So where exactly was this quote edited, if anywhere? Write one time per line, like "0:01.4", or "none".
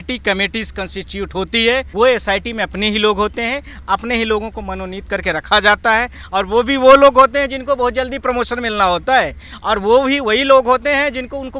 0:01.9